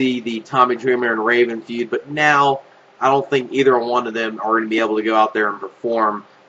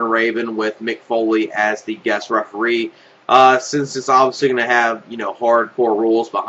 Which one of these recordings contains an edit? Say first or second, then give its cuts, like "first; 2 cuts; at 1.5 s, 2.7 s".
second; 1 cut; at 3.0 s